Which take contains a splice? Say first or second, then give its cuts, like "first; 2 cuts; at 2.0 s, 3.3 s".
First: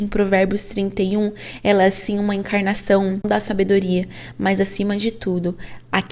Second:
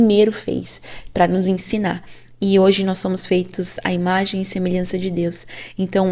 first; 1 cut; at 3.2 s